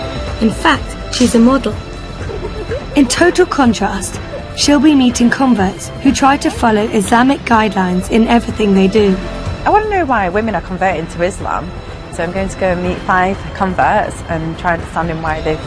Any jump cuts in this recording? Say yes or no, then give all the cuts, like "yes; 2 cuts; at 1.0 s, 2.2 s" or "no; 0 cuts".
yes; 1 cut; at 10.0 s